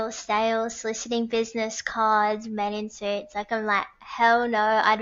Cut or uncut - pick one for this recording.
uncut